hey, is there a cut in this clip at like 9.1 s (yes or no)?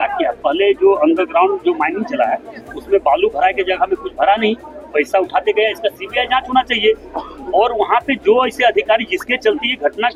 no